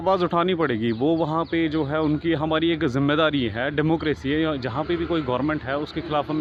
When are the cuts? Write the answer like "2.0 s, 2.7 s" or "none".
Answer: none